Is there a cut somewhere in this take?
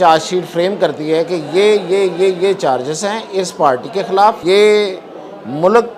yes; 1 cut; at 4.4 s

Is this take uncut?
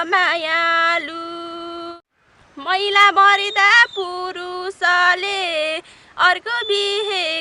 no; 1 cut; at 1.9 s

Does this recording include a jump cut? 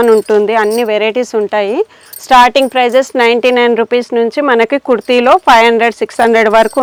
no; 0 cuts

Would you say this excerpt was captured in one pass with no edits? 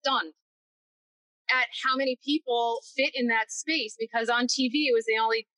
yes; 0 cuts

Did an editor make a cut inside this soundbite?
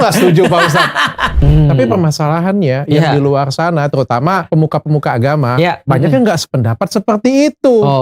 yes; 2 cuts; at 1.3 s, 4.4 s

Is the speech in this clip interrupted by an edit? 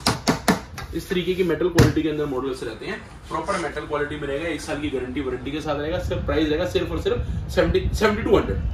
no; 0 cuts

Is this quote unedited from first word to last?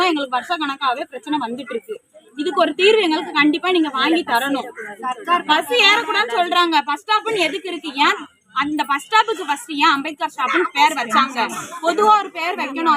yes; 0 cuts

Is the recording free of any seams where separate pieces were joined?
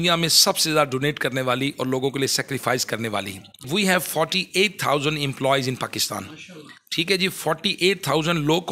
no; 1 cut; at 3.7 s

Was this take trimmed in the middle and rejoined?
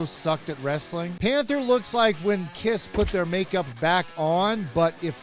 yes; 1 cut; at 1.1 s

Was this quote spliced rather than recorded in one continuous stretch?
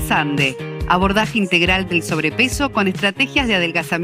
no; 0 cuts

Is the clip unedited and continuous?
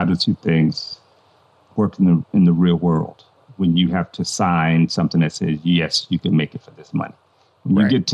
yes; 0 cuts

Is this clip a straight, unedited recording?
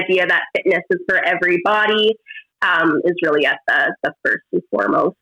yes; 0 cuts

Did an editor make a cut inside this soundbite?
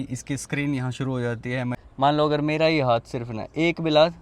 yes; 1 cut; at 1.8 s

